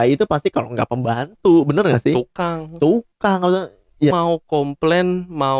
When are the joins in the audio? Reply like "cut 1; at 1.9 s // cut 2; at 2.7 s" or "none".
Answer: cut 1; at 4.1 s